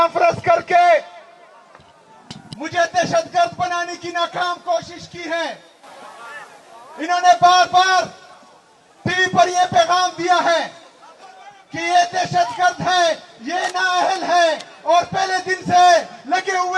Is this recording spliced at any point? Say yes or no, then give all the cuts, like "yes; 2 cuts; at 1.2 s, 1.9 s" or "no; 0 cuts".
no; 0 cuts